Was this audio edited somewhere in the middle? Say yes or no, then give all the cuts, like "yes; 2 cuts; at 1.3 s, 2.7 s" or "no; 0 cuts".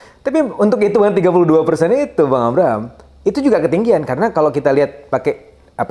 no; 0 cuts